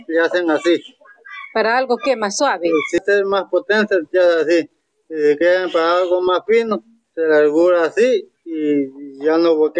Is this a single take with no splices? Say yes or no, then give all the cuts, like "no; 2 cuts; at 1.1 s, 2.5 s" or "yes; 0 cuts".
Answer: yes; 0 cuts